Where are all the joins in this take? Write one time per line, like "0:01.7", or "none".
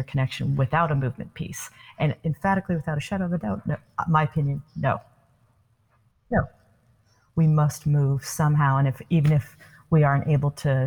none